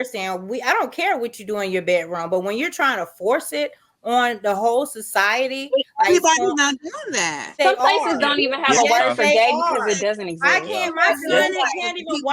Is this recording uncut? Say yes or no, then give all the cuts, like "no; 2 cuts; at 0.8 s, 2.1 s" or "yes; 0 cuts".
no; 1 cut; at 7.5 s